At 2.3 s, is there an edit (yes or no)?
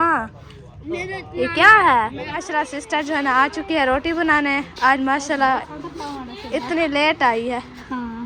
yes